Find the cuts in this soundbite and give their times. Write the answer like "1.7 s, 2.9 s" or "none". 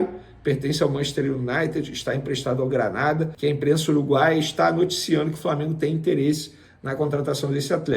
3.3 s